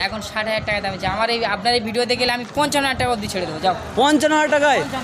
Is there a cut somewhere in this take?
no; 0 cuts

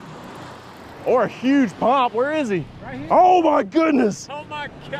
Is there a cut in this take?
no; 0 cuts

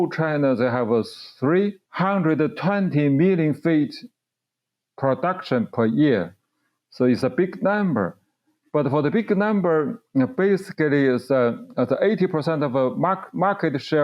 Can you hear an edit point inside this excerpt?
yes; 1 cut; at 1.8 s

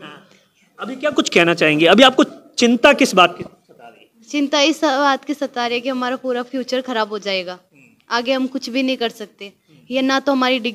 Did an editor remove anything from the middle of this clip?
no; 0 cuts

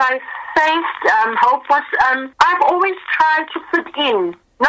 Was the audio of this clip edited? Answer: no; 0 cuts

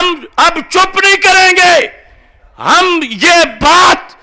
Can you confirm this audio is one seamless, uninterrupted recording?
yes; 0 cuts

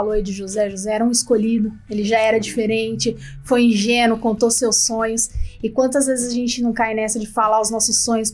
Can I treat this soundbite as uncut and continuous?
yes; 0 cuts

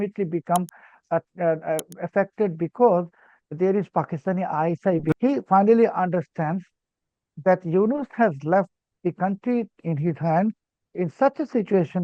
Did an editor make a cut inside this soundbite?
yes; 1 cut; at 5.1 s

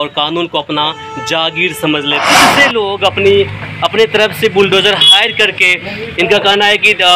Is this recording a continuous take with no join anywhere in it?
no; 1 cut; at 2.5 s

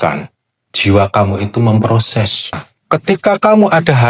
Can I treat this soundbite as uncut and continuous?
no; 1 cut; at 2.7 s

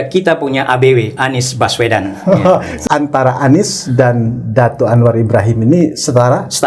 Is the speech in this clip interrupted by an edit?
yes; 1 cut; at 2.7 s

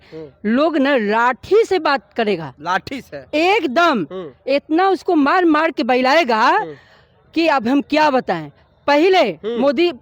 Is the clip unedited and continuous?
yes; 0 cuts

